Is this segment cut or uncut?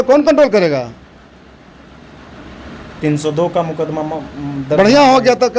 uncut